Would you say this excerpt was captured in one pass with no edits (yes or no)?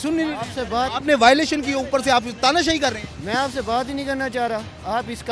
yes